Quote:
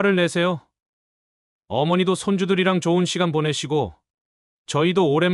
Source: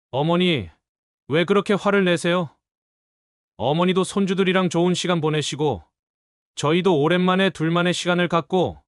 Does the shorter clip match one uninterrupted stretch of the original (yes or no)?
yes